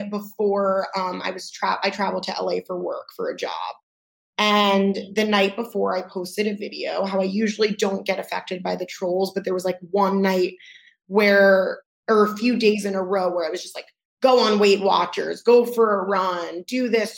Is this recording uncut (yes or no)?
yes